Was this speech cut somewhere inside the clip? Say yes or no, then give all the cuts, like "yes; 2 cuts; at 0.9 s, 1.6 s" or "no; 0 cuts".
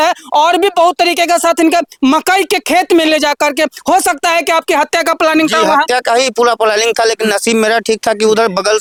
no; 0 cuts